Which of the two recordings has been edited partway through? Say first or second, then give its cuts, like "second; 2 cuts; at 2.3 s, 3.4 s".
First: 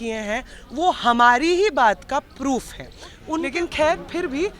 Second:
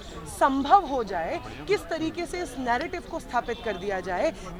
first; 1 cut; at 3.2 s